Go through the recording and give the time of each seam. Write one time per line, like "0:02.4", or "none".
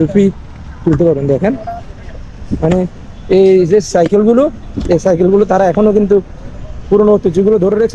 none